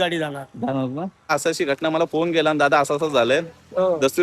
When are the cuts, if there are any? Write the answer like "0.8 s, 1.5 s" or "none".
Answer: 1.3 s